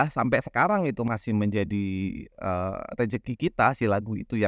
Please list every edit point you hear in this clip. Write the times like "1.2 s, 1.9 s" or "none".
1.1 s